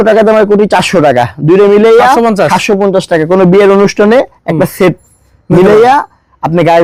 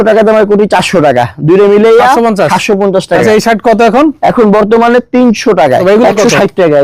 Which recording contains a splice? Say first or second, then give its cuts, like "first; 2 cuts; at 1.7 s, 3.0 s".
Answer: second; 2 cuts; at 3.2 s, 5.8 s